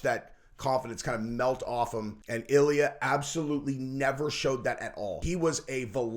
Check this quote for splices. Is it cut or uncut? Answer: cut